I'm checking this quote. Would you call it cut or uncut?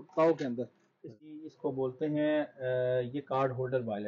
cut